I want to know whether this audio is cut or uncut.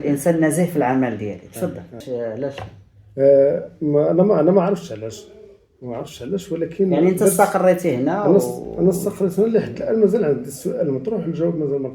cut